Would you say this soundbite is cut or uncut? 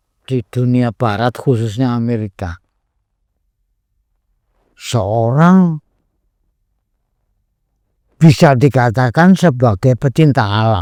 uncut